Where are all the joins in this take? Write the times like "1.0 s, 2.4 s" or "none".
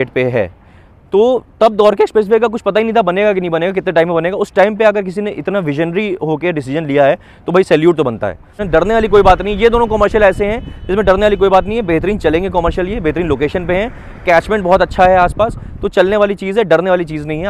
8.5 s